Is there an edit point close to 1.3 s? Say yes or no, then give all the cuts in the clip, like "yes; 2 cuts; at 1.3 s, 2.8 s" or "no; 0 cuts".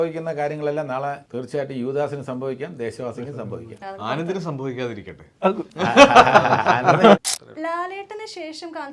yes; 3 cuts; at 1.3 s, 5.7 s, 7.4 s